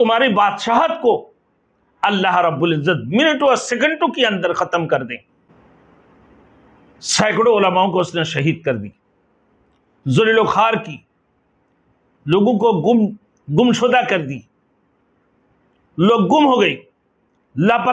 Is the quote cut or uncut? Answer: cut